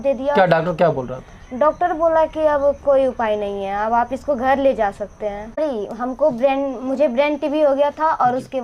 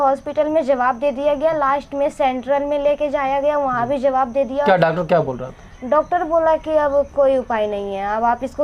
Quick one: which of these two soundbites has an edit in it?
first; 1 cut; at 5.6 s

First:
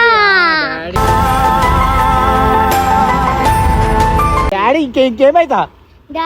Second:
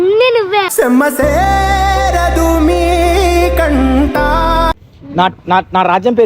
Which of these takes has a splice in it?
second; 1 cut; at 4.8 s

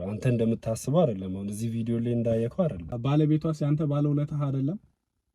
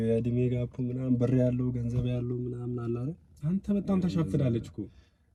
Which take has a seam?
first; 1 cut; at 2.9 s

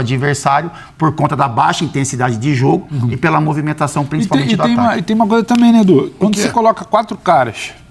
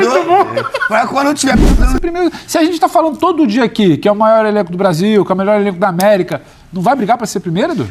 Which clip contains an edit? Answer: second; 1 cut; at 1.8 s

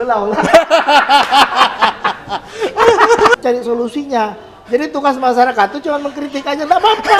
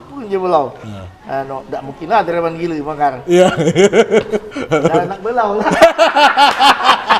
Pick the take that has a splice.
first; 1 cut; at 3.4 s

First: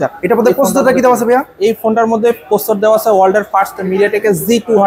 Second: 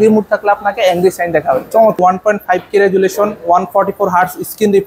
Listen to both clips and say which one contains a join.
second; 1 cut; at 2.0 s

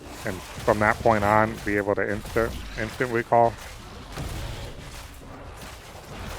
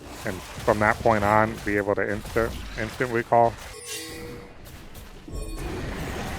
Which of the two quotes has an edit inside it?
second; 1 cut; at 3.7 s

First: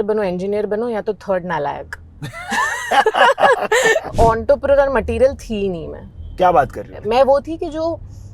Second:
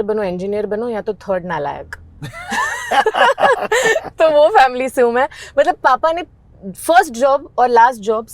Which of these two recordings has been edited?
first; 2 cuts; at 4.1 s, 6.9 s

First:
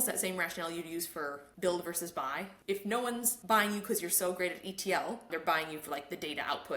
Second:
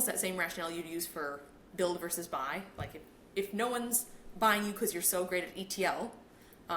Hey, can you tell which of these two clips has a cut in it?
first; 4 cuts; at 1.4 s, 2.5 s, 3.3 s, 5.3 s

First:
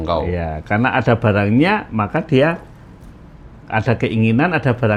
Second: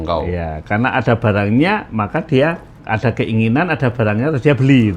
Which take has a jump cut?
second; 1 cut; at 2.7 s

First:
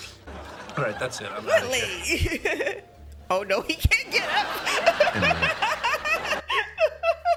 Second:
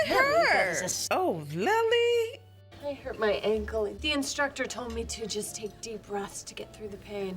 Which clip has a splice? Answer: second; 2 cuts; at 1.0 s, 4.0 s

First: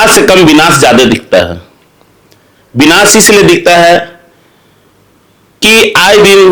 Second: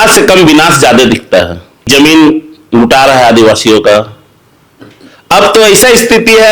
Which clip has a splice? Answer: second; 1 cut; at 1.9 s

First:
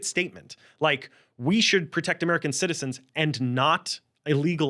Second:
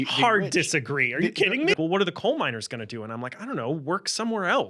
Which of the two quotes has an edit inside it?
second; 1 cut; at 1.7 s

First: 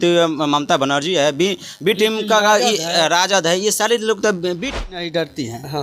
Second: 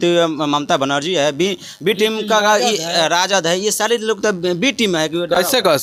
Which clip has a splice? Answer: first; 1 cut; at 4.8 s

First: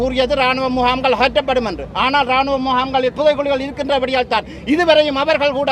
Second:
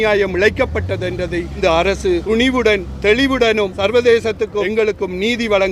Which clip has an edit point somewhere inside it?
second; 4 cuts; at 1.6 s, 2.2 s, 3.8 s, 4.7 s

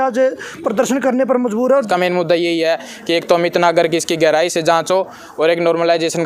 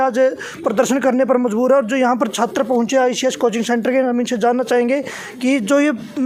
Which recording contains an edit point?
first; 1 cut; at 1.9 s

